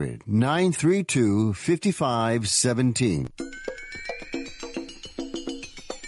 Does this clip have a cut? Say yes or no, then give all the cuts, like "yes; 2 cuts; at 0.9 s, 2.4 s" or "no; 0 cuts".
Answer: yes; 1 cut; at 3.3 s